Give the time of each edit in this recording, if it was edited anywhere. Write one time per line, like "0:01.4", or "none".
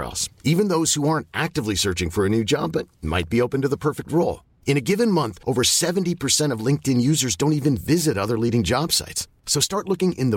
none